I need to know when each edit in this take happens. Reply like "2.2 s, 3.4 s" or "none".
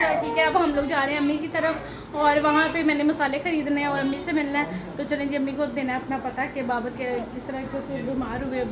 none